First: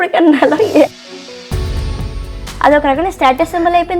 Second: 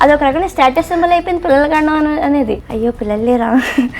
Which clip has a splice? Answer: second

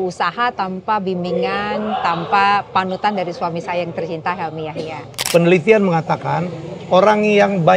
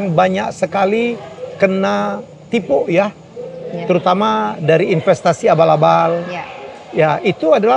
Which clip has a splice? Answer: first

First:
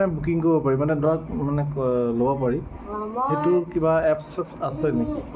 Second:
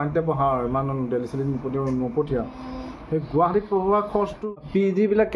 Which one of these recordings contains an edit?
second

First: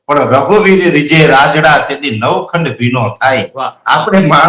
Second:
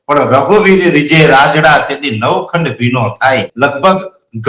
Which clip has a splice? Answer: second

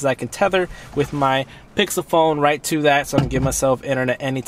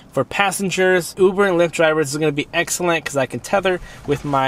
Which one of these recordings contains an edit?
second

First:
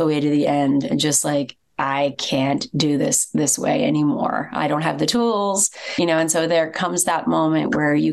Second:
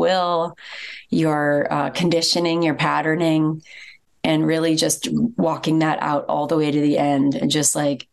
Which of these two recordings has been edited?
first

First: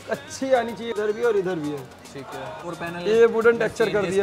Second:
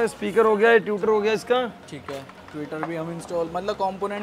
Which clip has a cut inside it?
first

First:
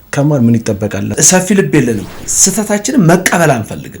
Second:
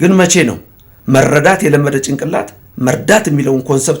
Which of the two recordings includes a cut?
first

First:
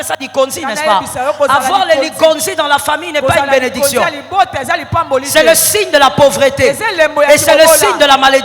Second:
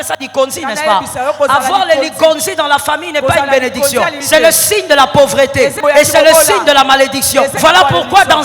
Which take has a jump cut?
second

